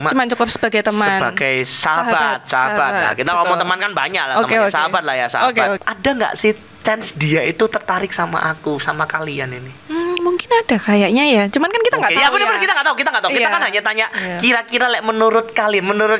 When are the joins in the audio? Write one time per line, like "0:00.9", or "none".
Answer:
0:05.8